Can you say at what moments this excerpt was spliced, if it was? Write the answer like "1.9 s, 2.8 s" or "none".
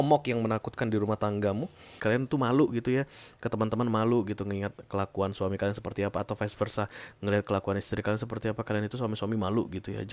2.0 s